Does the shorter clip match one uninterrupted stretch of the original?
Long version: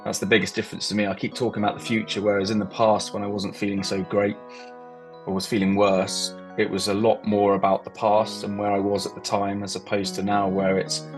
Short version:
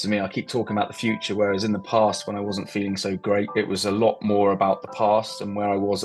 no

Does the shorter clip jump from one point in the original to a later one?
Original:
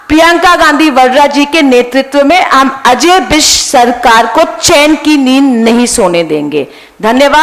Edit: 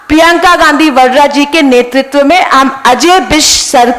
no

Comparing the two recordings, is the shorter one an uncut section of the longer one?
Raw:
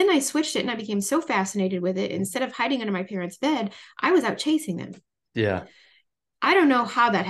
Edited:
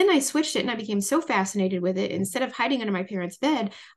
yes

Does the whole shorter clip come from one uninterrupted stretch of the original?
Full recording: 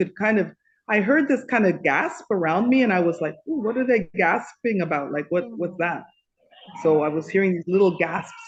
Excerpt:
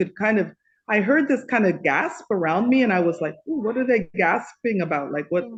yes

